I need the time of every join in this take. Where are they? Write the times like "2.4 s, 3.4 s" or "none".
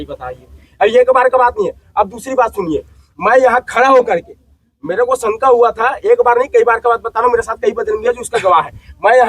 none